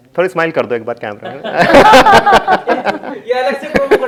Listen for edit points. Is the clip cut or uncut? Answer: uncut